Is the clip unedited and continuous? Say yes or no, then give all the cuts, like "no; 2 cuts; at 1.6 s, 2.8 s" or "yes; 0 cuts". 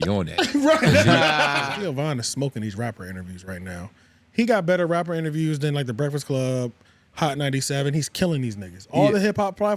no; 1 cut; at 1.7 s